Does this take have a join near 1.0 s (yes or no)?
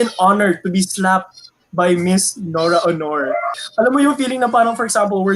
no